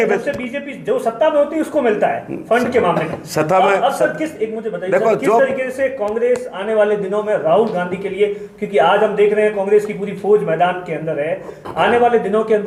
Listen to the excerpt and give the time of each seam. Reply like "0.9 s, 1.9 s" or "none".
none